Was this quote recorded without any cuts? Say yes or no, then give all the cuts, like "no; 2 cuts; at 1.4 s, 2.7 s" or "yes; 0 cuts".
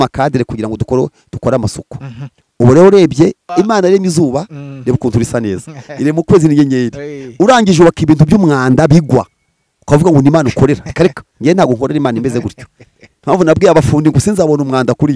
no; 1 cut; at 3.5 s